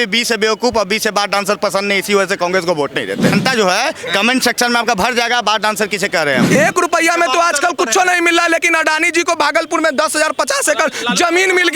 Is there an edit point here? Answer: yes; 2 cuts; at 3.4 s, 6.5 s

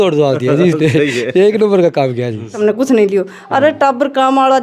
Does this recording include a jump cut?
yes; 1 cut; at 2.5 s

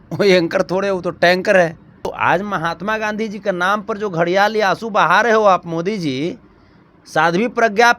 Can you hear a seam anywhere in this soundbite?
yes; 1 cut; at 2.1 s

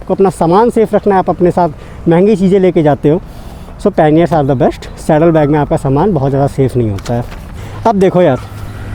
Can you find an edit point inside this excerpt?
no; 0 cuts

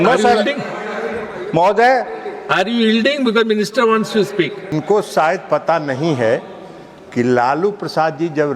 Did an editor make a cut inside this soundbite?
yes; 1 cut; at 4.7 s

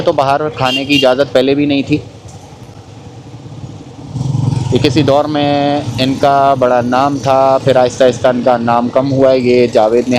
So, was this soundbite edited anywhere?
no; 0 cuts

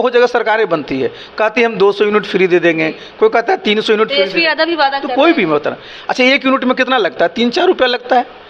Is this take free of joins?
yes; 0 cuts

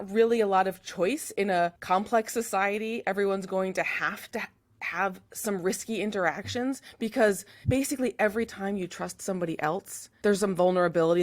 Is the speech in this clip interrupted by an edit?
yes; 3 cuts; at 1.8 s, 7.5 s, 10.0 s

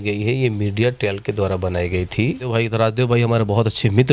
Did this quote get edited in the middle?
yes; 1 cut; at 2.4 s

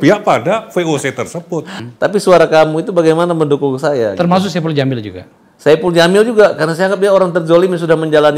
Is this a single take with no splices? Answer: no; 1 cut; at 1.8 s

